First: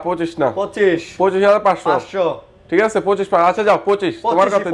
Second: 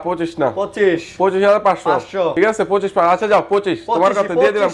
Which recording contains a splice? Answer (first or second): second